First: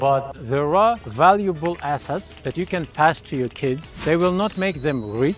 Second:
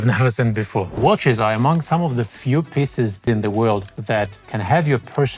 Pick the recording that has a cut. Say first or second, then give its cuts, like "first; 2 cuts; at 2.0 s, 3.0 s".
second; 3 cuts; at 0.9 s, 3.2 s, 4.2 s